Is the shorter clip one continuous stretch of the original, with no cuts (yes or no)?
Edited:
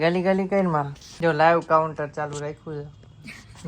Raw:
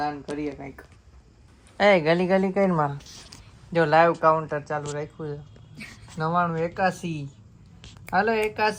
no